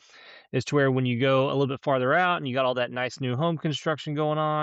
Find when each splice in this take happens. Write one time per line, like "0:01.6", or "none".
none